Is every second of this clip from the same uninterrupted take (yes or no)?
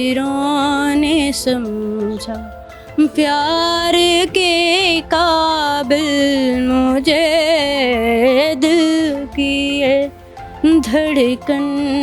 yes